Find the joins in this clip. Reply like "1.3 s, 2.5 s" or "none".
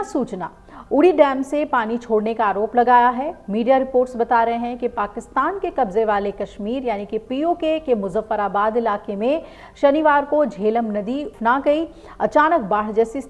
11.3 s